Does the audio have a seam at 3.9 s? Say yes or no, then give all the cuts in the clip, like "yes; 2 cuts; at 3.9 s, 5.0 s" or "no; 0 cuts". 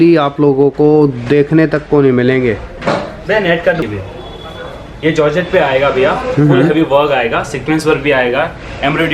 yes; 1 cut; at 3.9 s